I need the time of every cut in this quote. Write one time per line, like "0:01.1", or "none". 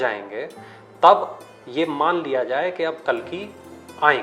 none